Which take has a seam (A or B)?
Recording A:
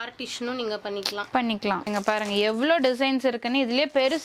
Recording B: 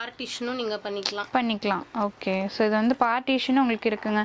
A